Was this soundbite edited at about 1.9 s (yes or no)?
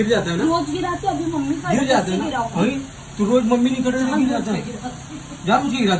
no